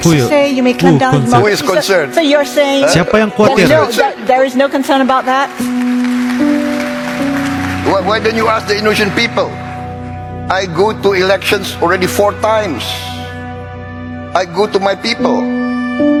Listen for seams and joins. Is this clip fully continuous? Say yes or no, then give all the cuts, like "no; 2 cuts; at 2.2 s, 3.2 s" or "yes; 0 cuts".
yes; 0 cuts